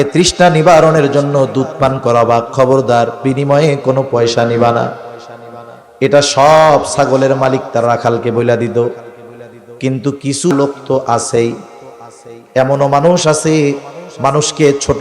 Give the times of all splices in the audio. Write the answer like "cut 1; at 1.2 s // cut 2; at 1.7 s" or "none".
cut 1; at 10.5 s